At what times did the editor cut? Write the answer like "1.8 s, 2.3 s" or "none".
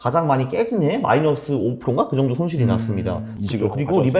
3.3 s